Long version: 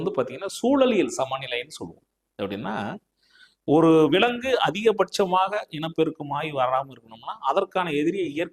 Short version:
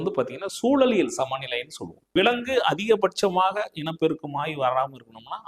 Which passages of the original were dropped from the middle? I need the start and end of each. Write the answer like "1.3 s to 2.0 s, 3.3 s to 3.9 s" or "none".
2.1 s to 4.1 s